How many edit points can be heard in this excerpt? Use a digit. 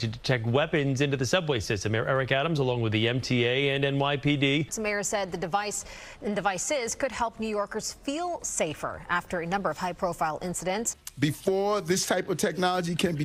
0